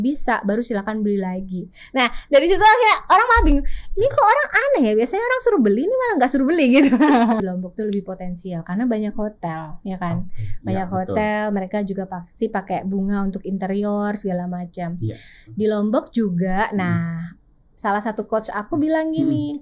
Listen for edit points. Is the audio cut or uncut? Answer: cut